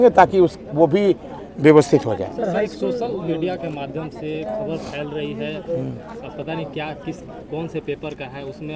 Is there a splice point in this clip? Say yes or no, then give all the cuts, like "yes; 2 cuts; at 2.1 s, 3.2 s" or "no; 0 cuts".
no; 0 cuts